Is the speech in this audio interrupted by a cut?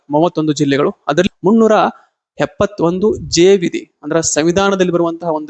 yes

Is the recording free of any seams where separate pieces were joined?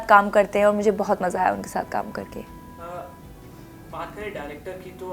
yes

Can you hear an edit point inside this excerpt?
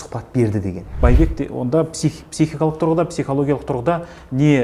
yes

